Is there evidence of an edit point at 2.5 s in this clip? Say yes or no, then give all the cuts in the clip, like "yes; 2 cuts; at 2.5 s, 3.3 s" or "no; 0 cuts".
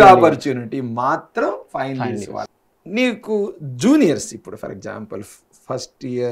yes; 1 cut; at 2.5 s